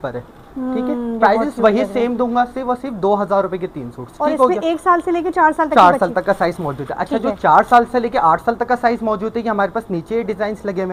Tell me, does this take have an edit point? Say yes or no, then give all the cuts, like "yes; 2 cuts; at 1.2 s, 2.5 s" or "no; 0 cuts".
no; 0 cuts